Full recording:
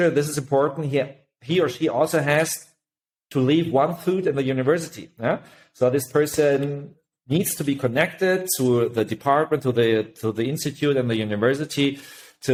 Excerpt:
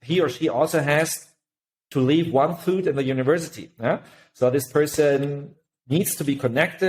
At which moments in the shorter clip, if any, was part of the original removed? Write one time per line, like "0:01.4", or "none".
none